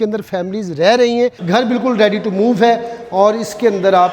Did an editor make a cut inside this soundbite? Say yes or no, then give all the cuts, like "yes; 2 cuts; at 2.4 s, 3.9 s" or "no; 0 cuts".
yes; 1 cut; at 1.4 s